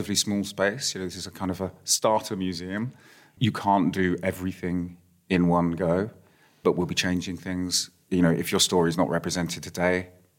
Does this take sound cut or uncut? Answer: uncut